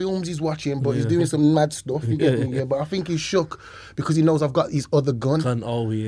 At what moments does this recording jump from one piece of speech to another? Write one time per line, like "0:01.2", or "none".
none